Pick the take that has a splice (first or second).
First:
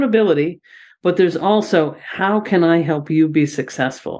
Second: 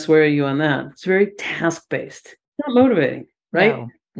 second